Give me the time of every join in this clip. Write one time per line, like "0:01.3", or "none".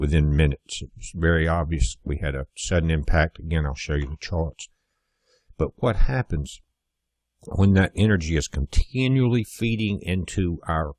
0:04.3